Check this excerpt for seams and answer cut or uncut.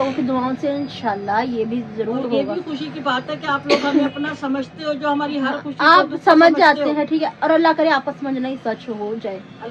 uncut